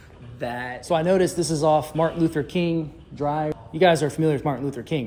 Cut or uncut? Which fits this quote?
cut